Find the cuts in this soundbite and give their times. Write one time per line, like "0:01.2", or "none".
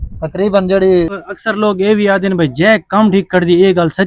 0:01.1